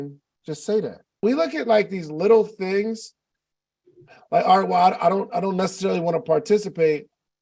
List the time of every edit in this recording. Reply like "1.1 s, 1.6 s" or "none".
1.2 s